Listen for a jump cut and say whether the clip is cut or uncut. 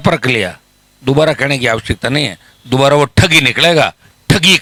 uncut